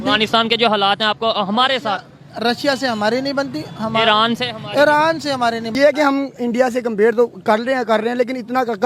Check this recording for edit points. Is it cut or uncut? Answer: cut